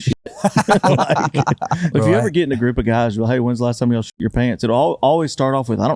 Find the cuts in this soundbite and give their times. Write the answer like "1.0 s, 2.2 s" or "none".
1.9 s